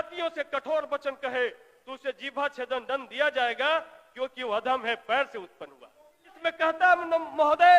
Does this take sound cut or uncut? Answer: cut